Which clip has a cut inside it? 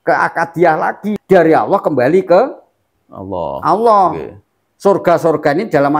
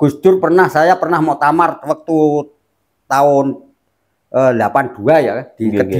first; 1 cut; at 1.1 s

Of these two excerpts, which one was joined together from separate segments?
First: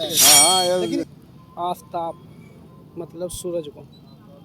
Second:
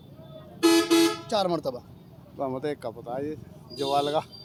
first; 1 cut; at 1.1 s

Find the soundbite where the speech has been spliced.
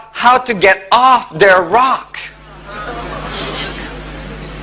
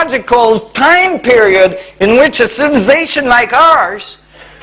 second; 1 cut; at 3.5 s

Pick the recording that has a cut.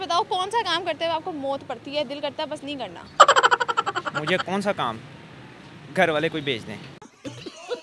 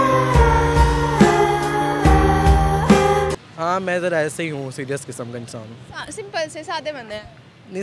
second; 1 cut; at 3.5 s

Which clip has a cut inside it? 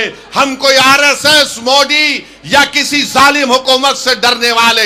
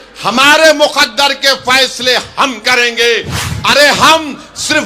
second; 1 cut; at 3.4 s

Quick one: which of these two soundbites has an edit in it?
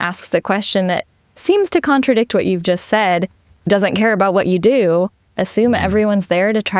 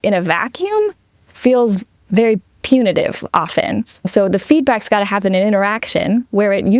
first; 1 cut; at 5.2 s

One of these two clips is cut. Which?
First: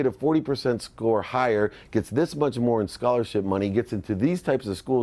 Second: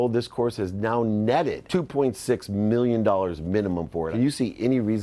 second; 2 cuts; at 1.6 s, 4.1 s

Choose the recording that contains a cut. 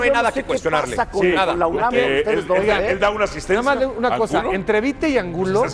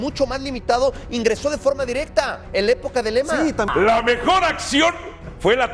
second; 1 cut; at 3.7 s

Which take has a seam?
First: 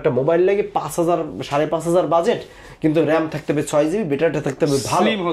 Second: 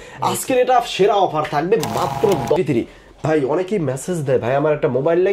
second; 1 cut; at 2.6 s

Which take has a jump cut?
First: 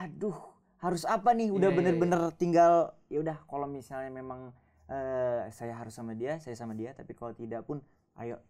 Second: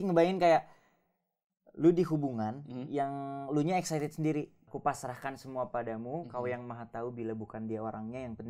second; 1 cut; at 4.6 s

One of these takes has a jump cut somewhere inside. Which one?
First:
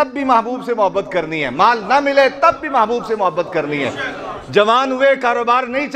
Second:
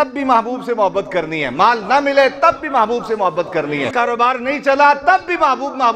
second; 1 cut; at 3.9 s

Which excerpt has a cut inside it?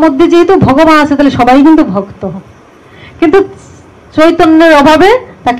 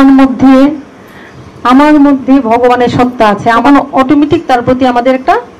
second; 1 cut; at 3.6 s

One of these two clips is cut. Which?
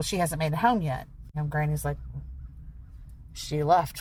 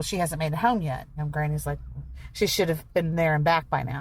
second; 2 cuts; at 1.1 s, 2.2 s

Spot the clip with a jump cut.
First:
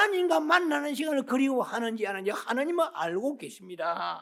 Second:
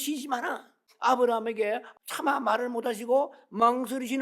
second; 2 cuts; at 0.9 s, 1.9 s

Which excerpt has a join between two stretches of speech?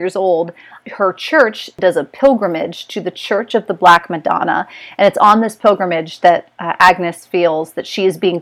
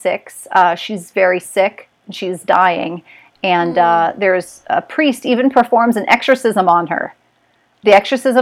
first; 1 cut; at 1.7 s

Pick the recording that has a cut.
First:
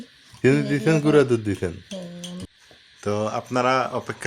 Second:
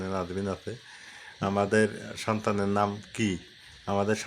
first; 1 cut; at 2.4 s

